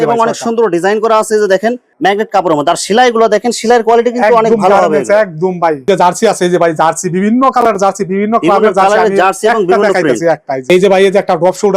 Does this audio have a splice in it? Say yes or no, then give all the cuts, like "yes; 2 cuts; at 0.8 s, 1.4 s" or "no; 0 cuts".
yes; 3 cuts; at 1.8 s, 5.8 s, 10.6 s